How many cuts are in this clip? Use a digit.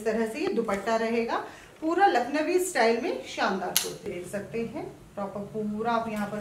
1